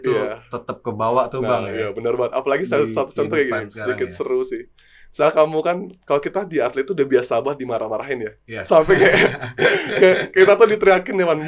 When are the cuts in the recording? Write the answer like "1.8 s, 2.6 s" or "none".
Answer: none